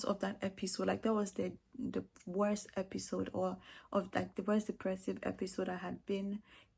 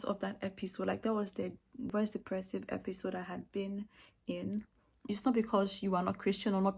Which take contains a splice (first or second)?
second